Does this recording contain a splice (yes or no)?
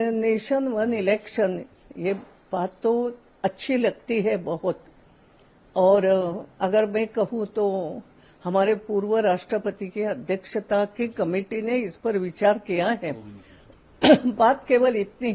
no